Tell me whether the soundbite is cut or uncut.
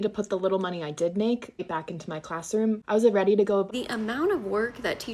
cut